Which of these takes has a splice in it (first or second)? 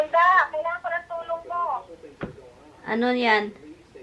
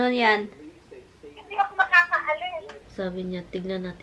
second